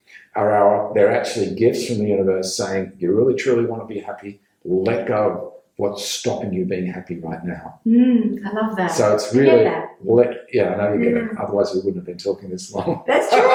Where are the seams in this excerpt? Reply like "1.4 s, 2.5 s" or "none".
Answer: none